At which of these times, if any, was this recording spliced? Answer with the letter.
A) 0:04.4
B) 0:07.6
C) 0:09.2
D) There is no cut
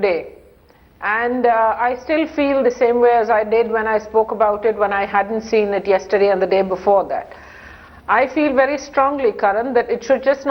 C